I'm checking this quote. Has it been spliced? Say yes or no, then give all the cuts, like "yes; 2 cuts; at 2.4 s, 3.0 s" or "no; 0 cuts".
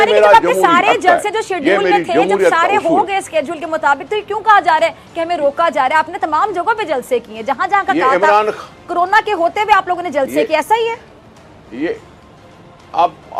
no; 0 cuts